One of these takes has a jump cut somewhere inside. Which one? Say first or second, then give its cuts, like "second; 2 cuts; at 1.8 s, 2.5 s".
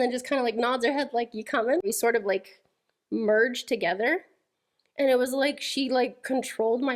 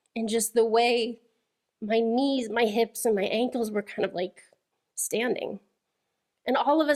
first; 1 cut; at 1.8 s